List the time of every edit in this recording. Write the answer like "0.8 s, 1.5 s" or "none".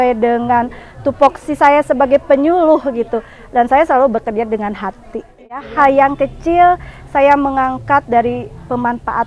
5.7 s